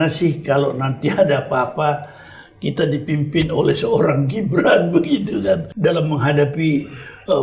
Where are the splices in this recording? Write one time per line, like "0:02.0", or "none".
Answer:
0:05.7